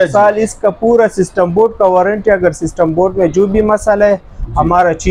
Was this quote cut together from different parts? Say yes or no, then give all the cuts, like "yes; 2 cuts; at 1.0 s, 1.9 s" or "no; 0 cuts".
no; 0 cuts